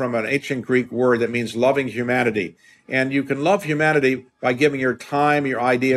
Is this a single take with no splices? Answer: yes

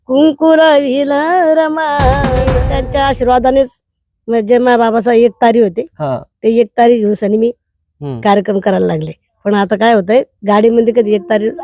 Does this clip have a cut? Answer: yes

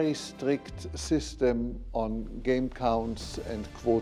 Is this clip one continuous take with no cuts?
yes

